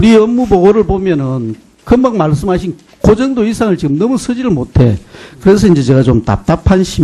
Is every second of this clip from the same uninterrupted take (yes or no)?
no